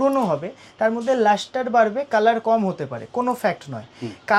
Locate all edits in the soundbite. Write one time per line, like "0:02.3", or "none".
none

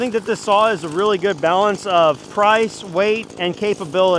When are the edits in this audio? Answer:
0:02.2
0:03.3

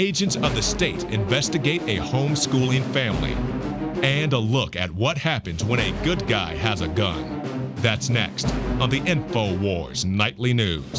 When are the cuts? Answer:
0:09.3

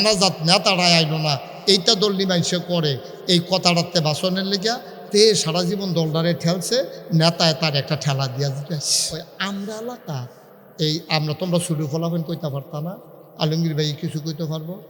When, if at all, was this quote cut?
0:09.4

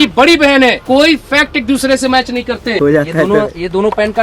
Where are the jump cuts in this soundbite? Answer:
0:00.8
0:02.8

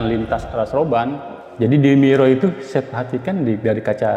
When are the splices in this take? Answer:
0:01.3

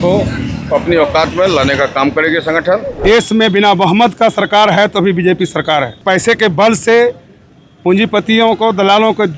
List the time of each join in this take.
0:03.0
0:06.0

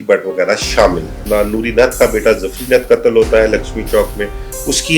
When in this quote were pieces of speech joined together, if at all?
0:01.2

